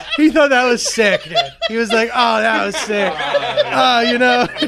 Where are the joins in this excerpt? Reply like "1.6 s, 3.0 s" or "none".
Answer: none